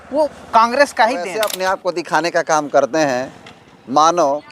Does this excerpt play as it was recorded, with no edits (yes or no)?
no